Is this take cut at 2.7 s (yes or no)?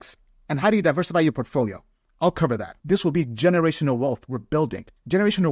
yes